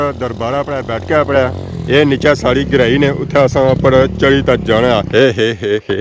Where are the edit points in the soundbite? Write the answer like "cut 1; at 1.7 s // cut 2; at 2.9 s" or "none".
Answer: cut 1; at 5.1 s